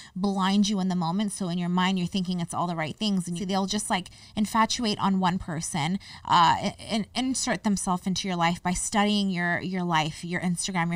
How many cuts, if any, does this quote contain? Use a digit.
1